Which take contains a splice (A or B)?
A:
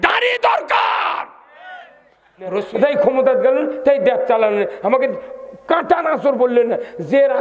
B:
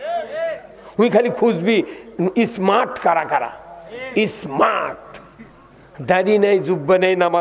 A